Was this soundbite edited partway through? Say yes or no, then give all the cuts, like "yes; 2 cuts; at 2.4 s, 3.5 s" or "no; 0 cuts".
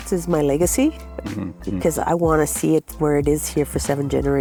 no; 0 cuts